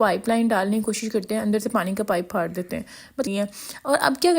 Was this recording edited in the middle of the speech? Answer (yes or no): yes